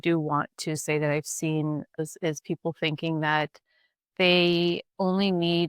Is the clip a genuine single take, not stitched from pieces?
no; 2 cuts; at 2.0 s, 4.9 s

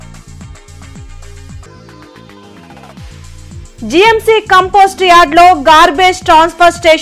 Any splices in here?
yes; 1 cut; at 3.6 s

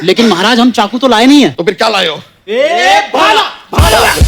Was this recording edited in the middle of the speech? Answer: no; 0 cuts

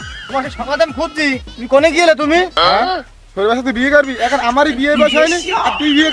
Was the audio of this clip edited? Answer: yes; 1 cut; at 2.6 s

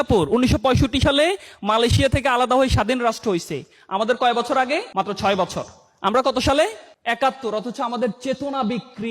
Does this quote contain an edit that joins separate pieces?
yes; 2 cuts; at 4.9 s, 6.9 s

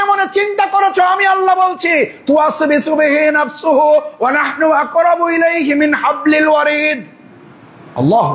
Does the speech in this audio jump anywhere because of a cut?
no; 0 cuts

